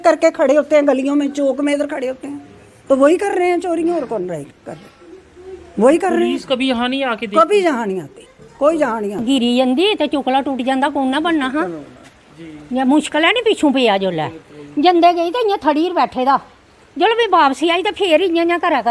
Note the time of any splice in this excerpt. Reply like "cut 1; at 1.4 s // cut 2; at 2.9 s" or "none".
cut 1; at 9.2 s